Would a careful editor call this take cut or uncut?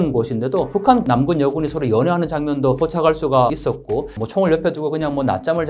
cut